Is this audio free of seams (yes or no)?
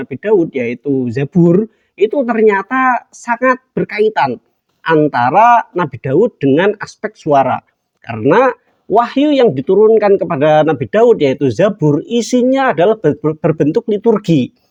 yes